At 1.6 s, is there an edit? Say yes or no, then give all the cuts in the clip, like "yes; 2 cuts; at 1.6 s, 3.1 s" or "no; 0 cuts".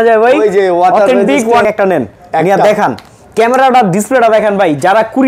yes; 1 cut; at 1.6 s